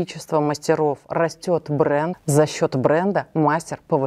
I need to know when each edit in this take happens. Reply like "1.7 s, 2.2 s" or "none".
2.2 s